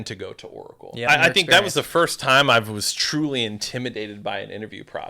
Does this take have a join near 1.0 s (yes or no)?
yes